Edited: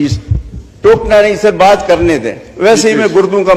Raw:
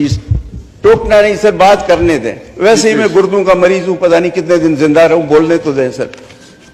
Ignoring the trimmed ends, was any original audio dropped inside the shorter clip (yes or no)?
no